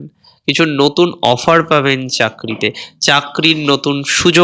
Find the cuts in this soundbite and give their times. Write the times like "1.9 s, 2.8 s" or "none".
none